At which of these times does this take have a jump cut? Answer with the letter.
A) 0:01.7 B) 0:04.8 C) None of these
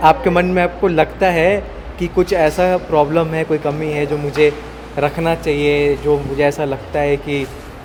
C